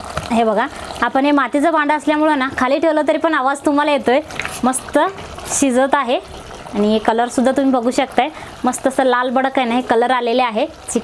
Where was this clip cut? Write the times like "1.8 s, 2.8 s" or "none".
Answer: none